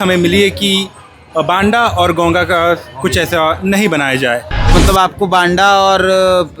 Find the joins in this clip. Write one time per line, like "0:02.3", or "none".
0:04.7